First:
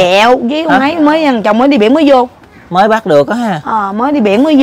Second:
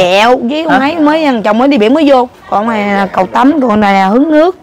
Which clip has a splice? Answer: second; 1 cut; at 2.4 s

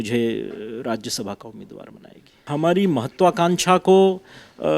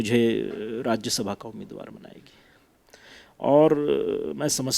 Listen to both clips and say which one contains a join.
first; 1 cut; at 2.5 s

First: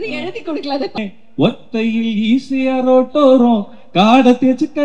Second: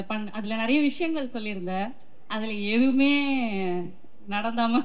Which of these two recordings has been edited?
first; 1 cut; at 1.0 s

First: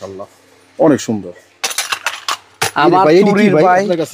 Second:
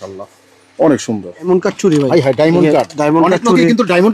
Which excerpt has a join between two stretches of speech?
second; 1 cut; at 1.5 s

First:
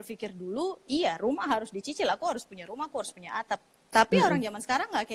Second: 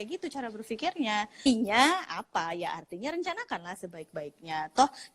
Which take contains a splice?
second; 1 cut; at 1.5 s

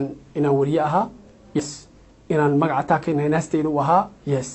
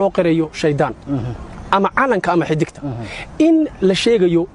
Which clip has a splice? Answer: first; 1 cut; at 1.6 s

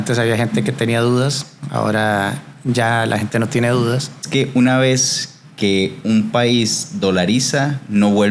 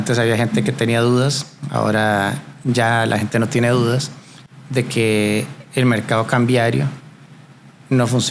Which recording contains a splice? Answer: first; 1 cut; at 4.3 s

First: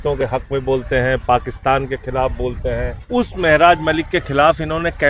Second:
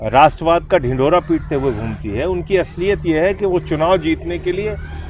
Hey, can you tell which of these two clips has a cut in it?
first; 1 cut; at 2.9 s

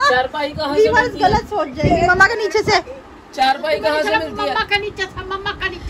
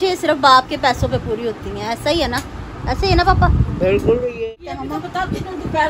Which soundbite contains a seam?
second; 2 cuts; at 1.7 s, 4.4 s

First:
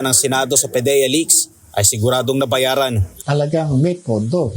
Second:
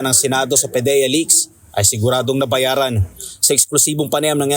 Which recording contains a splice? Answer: first; 1 cut; at 3.1 s

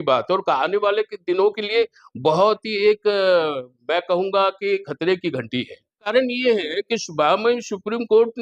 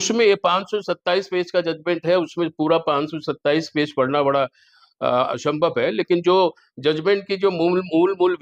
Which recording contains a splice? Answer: first; 1 cut; at 6.1 s

